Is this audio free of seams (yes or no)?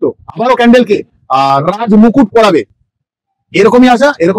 yes